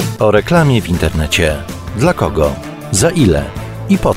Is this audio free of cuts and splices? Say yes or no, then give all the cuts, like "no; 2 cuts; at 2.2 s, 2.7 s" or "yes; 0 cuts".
yes; 0 cuts